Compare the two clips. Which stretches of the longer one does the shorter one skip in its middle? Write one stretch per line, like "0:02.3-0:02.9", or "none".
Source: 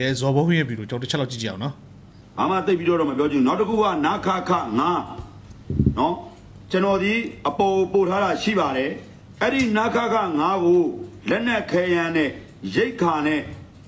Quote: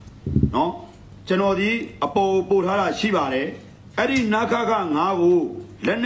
none